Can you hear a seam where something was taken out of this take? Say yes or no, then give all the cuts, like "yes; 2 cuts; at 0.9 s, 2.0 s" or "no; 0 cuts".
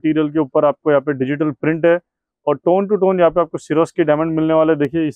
no; 0 cuts